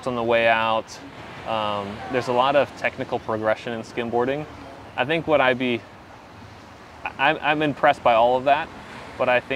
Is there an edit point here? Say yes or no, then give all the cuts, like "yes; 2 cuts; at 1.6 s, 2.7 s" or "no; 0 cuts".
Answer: no; 0 cuts